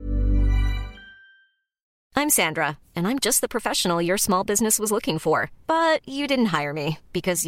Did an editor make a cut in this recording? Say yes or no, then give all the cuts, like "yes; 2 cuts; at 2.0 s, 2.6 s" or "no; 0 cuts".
yes; 1 cut; at 1.8 s